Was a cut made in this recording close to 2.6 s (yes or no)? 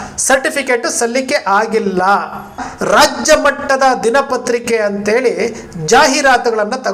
yes